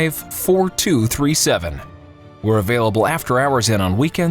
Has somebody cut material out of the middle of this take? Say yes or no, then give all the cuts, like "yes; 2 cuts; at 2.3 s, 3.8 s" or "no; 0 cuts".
yes; 1 cut; at 2.6 s